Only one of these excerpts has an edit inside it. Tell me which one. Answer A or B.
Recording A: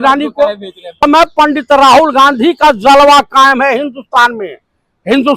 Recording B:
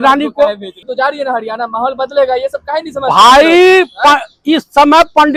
A